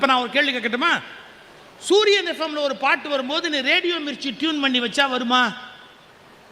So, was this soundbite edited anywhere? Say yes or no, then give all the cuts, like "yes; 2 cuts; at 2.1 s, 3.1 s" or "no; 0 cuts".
no; 0 cuts